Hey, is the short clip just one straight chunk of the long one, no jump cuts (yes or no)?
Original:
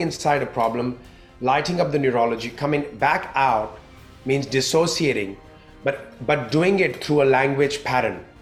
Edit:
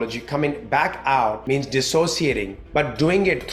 no